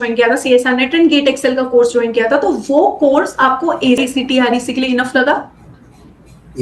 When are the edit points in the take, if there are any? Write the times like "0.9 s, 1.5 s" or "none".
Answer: 4.0 s

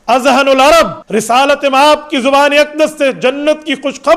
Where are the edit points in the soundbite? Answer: 1.0 s

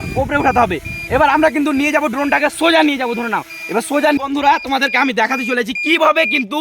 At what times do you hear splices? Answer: 4.2 s

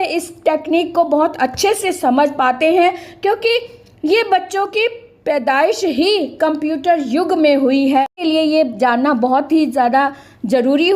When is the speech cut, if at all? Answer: 8.1 s

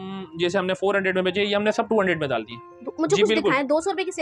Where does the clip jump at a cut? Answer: none

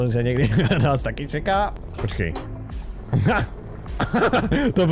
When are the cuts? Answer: 1.9 s

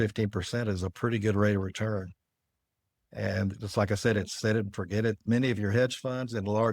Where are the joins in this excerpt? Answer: 5.2 s

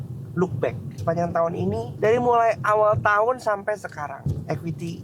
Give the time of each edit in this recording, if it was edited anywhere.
0.9 s, 1.9 s, 4.2 s

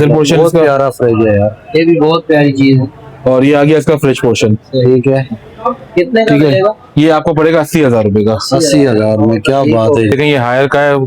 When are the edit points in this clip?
10.1 s

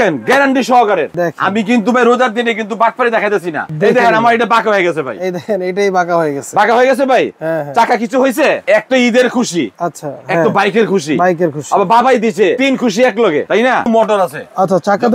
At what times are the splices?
3.7 s, 8.6 s, 13.8 s

